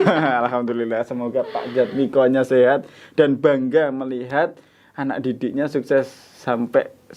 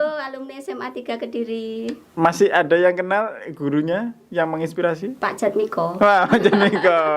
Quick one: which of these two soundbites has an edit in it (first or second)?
second